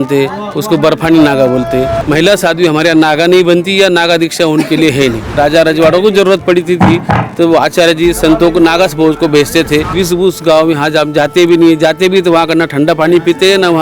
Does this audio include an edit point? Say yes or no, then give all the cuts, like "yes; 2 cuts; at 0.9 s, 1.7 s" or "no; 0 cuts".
yes; 3 cuts; at 2.0 s, 5.3 s, 10.0 s